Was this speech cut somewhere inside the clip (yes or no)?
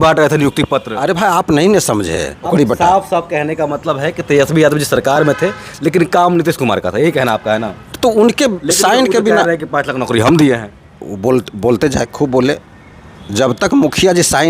yes